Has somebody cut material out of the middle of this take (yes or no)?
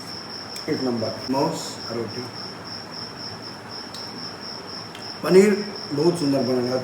yes